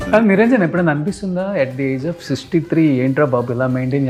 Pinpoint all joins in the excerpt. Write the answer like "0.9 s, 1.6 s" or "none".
none